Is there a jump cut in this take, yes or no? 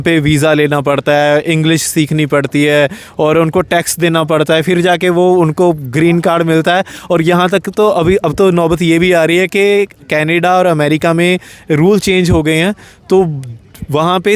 no